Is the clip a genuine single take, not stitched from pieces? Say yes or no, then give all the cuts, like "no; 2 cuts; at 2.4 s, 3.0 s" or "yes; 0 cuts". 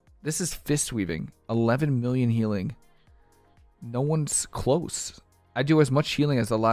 yes; 0 cuts